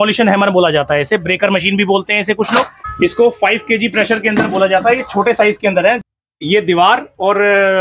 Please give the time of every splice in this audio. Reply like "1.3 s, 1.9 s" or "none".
2.8 s, 6.0 s